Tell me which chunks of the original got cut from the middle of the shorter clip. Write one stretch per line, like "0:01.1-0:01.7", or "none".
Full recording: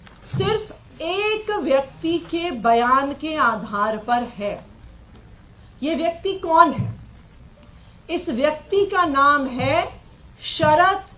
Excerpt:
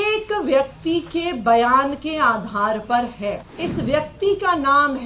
0:04.7-0:08.0